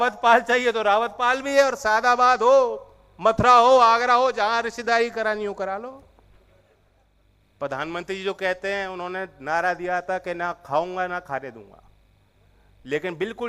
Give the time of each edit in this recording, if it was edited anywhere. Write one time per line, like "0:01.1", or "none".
0:07.0